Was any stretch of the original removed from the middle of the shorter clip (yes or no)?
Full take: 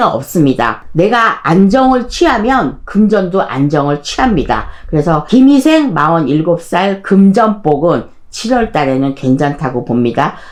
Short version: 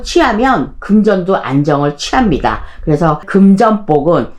yes